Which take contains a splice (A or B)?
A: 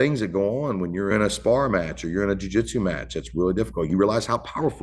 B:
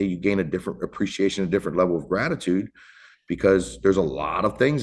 A